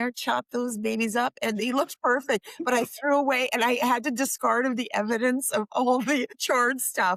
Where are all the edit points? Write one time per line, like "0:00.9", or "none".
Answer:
none

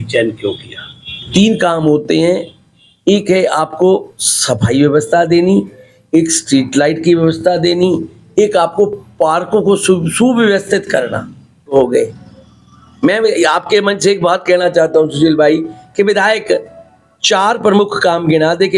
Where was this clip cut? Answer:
0:01.3
0:11.7

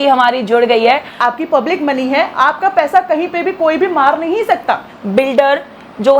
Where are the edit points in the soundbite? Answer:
0:01.1
0:04.9

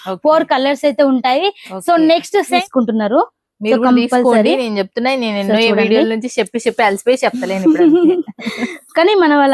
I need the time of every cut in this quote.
0:02.6

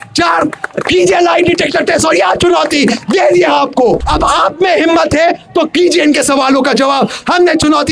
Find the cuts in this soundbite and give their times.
0:04.1

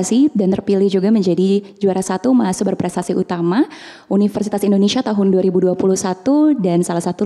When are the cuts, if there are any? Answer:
none

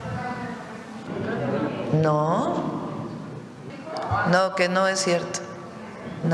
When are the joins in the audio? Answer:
0:01.1
0:03.7

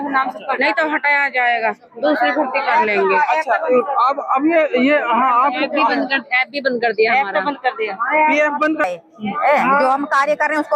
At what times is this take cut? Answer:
0:08.9

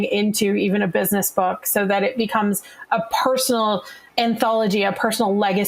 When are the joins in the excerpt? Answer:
0:04.0

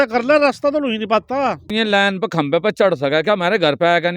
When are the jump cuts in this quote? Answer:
0:01.7

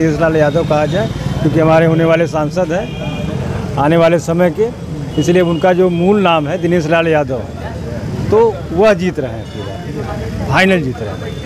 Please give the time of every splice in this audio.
none

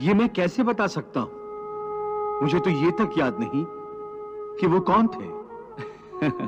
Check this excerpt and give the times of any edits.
none

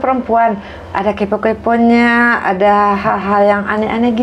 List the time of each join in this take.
none

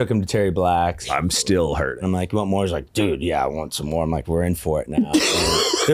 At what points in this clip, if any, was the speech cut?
0:01.0
0:02.0
0:04.2

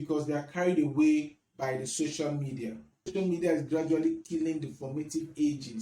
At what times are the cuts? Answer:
0:03.1

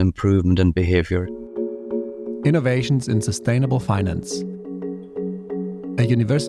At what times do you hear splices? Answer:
0:01.4

